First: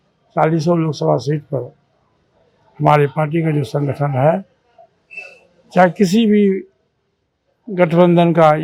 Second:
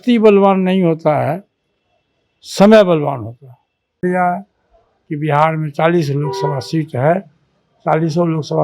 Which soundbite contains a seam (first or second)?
second